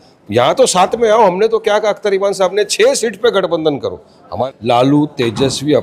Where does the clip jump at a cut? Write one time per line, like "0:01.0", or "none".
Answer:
0:04.3